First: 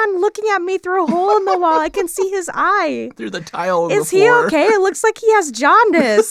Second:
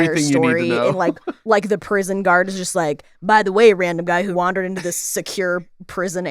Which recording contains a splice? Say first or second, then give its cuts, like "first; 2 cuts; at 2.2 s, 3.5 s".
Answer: second; 1 cut; at 1.3 s